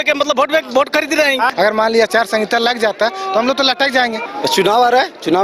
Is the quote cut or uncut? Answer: cut